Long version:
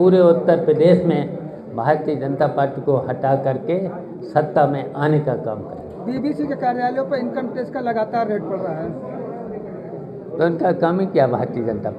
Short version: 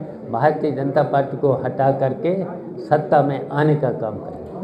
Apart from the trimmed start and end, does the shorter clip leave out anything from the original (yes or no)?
no